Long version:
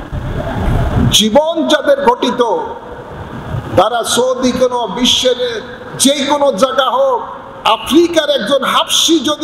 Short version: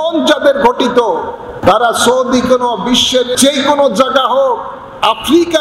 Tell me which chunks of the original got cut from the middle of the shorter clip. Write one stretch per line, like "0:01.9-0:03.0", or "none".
0:02.9-0:03.5
0:05.4-0:06.0